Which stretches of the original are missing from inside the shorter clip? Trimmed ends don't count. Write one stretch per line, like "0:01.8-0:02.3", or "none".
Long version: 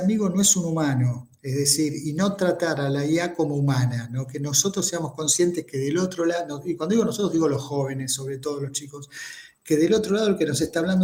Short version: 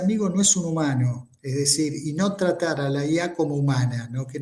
none